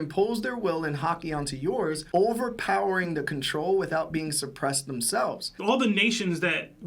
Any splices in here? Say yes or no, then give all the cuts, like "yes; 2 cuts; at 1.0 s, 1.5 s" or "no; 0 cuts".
yes; 1 cut; at 5.5 s